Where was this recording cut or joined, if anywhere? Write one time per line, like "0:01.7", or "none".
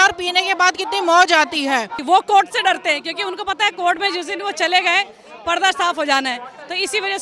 0:02.0